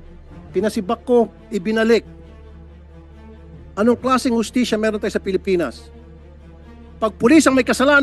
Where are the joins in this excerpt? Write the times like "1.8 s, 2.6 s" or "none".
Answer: none